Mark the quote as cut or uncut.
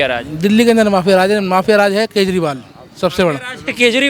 uncut